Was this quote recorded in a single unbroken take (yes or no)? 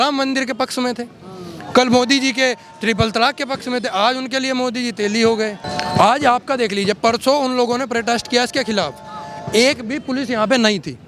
no